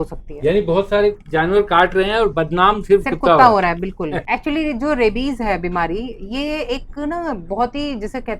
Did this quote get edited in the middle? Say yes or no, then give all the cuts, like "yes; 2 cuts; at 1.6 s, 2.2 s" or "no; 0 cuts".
yes; 1 cut; at 4.2 s